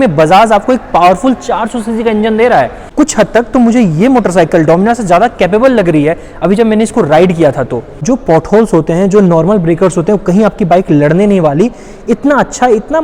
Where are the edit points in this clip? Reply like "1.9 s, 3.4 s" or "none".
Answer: 2.8 s, 7.9 s